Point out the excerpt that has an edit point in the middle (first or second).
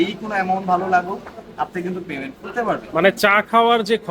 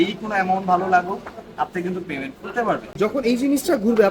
second